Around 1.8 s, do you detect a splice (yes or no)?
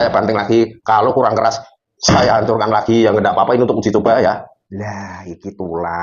no